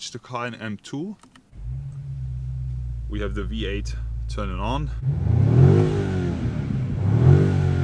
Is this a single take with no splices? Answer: no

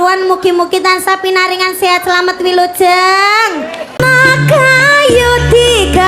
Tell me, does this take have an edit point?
yes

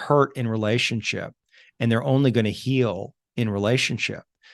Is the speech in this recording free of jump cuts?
yes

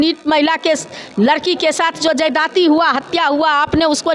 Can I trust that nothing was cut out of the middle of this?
yes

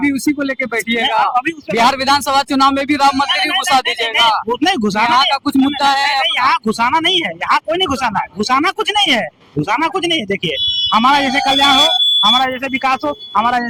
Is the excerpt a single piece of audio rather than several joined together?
yes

